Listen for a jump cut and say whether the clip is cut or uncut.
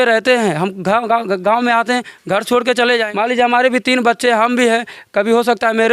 cut